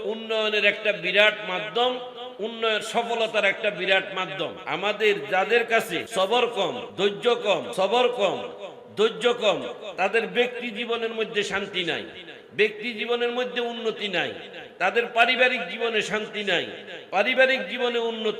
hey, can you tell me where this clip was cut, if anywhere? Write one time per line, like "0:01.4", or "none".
0:04.6
0:06.0
0:06.9
0:07.7